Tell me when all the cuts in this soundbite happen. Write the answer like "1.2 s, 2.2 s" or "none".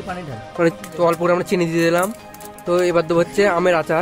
0.7 s, 2.6 s